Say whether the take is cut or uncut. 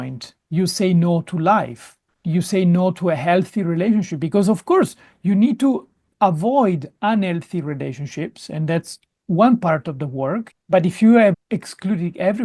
cut